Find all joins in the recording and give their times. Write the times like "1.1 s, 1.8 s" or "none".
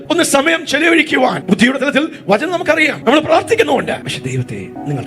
1.4 s, 2.9 s, 4.3 s